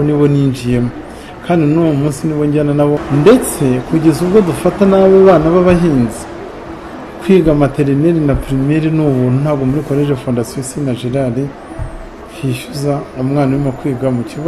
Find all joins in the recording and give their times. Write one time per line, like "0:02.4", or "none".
0:03.0